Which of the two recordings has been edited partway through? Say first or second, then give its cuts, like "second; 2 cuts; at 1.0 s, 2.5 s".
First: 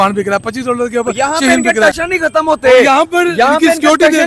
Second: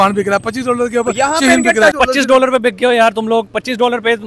second; 1 cut; at 2.0 s